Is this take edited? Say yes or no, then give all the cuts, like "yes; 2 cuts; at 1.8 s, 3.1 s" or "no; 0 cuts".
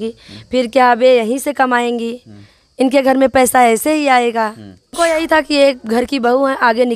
yes; 1 cut; at 4.9 s